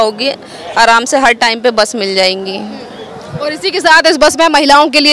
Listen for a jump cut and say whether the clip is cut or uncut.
uncut